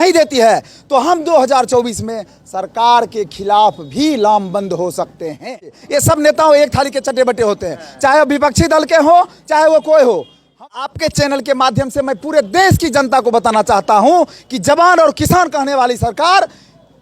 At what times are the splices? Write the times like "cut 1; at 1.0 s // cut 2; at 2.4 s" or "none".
cut 1; at 5.7 s // cut 2; at 10.6 s